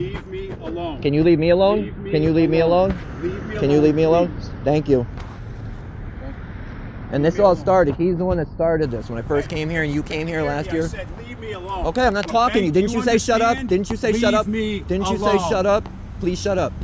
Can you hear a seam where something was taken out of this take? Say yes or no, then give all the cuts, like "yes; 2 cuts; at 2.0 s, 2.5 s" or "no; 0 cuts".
no; 0 cuts